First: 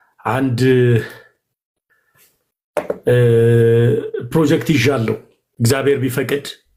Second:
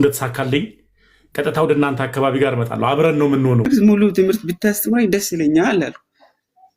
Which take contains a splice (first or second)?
second